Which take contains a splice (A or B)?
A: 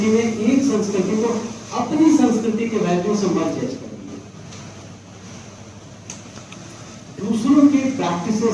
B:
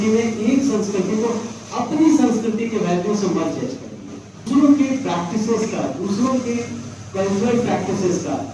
B